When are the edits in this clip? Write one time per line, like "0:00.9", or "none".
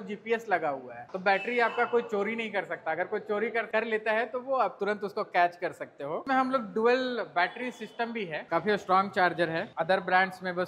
0:01.1
0:06.2
0:08.4